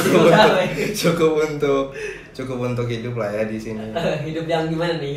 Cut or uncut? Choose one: uncut